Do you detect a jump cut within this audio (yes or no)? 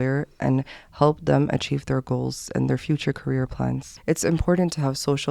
yes